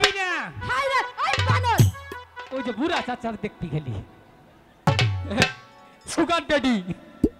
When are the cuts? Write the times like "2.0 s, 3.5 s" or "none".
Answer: 4.9 s